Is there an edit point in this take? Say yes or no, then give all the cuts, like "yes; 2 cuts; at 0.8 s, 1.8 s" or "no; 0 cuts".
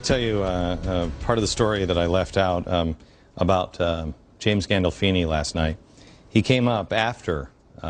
yes; 1 cut; at 1.7 s